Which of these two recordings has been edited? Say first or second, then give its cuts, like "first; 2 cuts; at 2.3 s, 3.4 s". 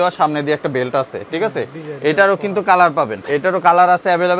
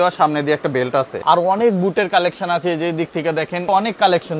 second; 2 cuts; at 1.2 s, 3.7 s